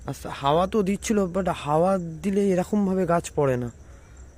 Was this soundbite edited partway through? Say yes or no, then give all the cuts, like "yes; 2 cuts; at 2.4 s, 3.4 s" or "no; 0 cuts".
no; 0 cuts